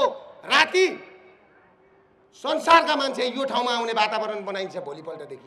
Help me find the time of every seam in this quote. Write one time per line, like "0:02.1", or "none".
none